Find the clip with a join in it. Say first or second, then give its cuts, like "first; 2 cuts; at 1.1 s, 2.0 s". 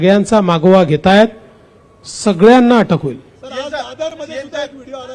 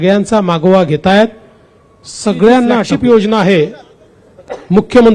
second; 1 cut; at 2.9 s